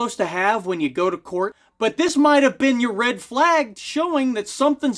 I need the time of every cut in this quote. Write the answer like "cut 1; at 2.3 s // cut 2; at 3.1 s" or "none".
cut 1; at 1.6 s